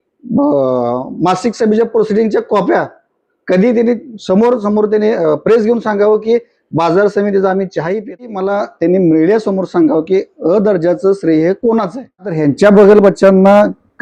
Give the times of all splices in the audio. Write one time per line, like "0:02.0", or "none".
0:08.3
0:12.4